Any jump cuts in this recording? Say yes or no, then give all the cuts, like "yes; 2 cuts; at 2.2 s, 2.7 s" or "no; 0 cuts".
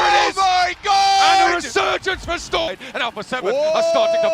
yes; 1 cut; at 2.7 s